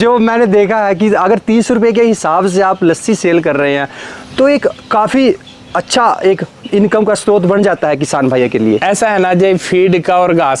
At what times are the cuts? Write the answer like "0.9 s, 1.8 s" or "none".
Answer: none